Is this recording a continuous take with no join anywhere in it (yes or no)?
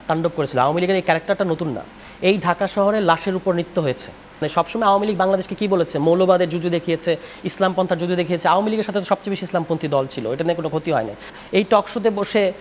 no